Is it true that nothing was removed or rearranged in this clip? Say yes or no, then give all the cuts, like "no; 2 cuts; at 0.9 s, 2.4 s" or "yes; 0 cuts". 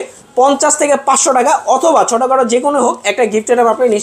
yes; 0 cuts